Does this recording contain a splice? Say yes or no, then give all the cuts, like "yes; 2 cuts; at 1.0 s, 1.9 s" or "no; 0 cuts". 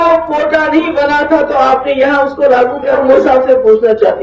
yes; 1 cut; at 3.0 s